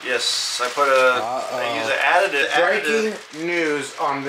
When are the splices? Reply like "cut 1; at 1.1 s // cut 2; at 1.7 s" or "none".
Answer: cut 1; at 2.4 s